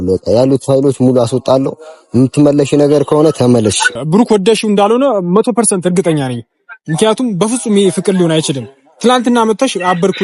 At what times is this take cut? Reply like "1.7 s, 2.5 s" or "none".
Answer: 3.9 s